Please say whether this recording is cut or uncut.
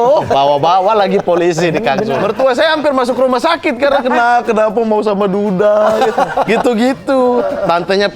cut